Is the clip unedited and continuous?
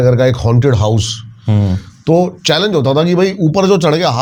yes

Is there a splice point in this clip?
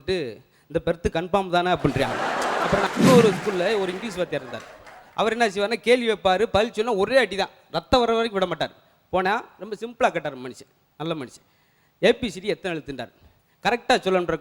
yes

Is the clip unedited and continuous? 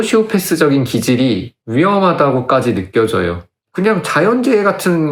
yes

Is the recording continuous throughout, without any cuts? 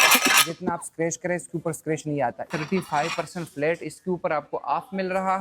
no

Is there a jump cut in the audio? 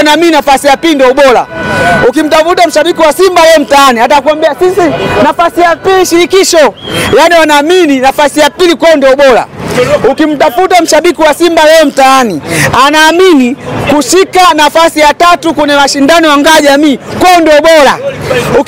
no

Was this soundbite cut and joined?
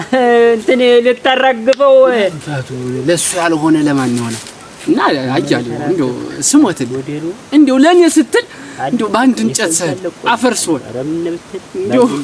no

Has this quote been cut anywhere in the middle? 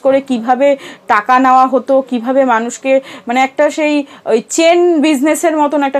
no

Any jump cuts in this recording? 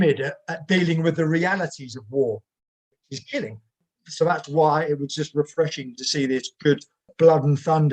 yes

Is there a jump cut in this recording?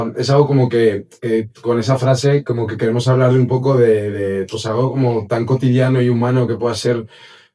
no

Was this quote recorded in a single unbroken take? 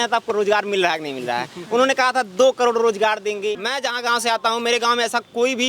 no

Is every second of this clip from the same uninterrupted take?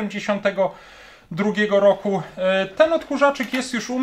yes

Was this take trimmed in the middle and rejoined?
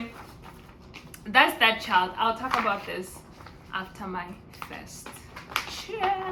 no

